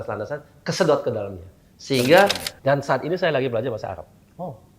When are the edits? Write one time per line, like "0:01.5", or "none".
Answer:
0:02.5